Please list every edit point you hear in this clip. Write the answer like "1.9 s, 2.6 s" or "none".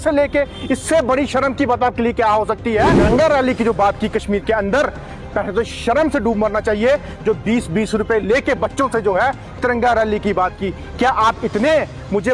3.0 s